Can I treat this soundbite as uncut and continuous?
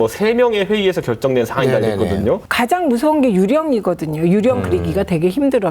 no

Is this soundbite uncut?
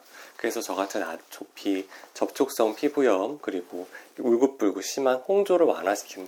yes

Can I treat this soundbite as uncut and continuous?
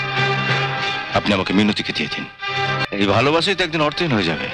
no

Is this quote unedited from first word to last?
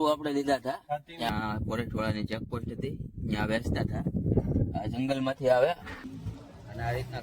no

